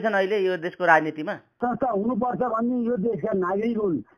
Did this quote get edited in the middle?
yes; 1 cut; at 1.6 s

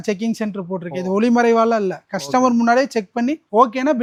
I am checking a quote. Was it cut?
no; 0 cuts

